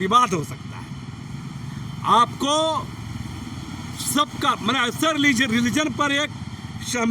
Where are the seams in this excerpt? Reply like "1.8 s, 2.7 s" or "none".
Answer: none